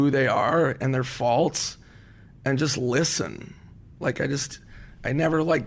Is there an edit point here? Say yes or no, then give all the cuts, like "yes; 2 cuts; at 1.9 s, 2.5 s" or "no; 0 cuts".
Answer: no; 0 cuts